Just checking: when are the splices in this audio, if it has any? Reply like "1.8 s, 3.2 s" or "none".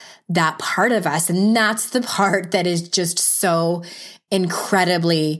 none